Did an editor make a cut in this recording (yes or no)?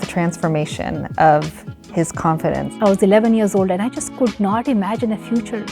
yes